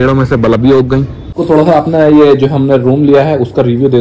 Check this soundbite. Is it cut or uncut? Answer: cut